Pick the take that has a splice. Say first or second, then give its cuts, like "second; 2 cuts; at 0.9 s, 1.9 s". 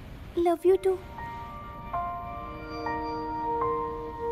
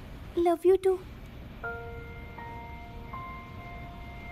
first; 2 cuts; at 1.1 s, 2.7 s